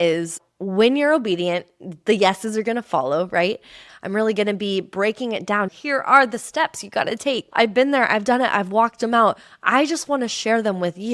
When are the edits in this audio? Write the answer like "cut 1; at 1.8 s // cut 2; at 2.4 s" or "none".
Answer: cut 1; at 3.8 s // cut 2; at 5.7 s // cut 3; at 7.5 s